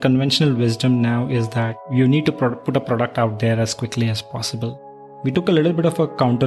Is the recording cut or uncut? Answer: cut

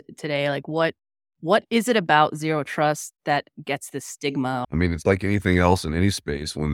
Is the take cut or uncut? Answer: cut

